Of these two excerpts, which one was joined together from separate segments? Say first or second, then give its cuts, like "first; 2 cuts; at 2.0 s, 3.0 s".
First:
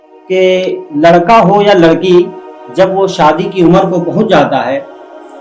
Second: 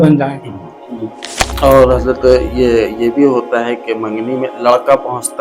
second; 1 cut; at 1.4 s